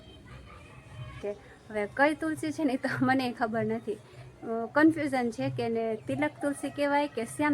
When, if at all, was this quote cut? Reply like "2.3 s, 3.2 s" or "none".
1.2 s